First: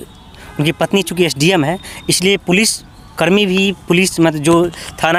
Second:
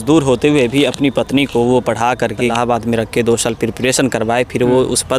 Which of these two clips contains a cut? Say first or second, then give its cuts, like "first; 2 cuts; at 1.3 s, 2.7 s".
second; 1 cut; at 2.5 s